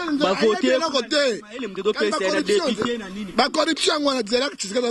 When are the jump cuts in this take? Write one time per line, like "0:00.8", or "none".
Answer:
none